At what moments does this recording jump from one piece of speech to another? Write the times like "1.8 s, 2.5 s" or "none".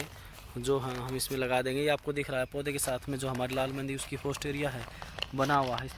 none